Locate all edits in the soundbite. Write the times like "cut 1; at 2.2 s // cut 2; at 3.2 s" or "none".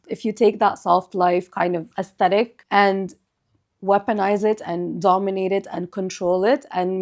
cut 1; at 2.4 s // cut 2; at 4.6 s